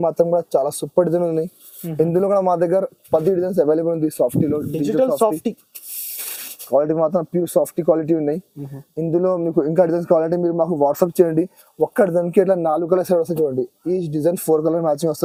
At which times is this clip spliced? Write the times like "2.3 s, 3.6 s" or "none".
none